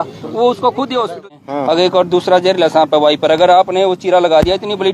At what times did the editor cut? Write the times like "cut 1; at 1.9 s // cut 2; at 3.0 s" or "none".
cut 1; at 1.2 s